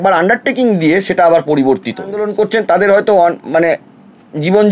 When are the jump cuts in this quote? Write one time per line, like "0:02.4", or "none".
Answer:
0:02.2